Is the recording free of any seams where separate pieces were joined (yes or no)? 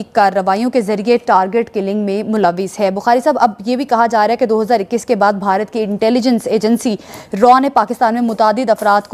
yes